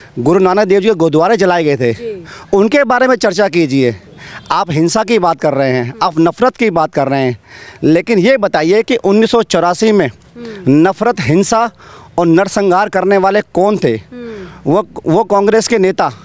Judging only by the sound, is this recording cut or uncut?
uncut